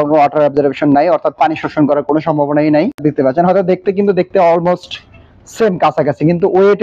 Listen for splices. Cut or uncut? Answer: cut